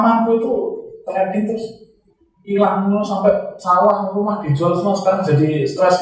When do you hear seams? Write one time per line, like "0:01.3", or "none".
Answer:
none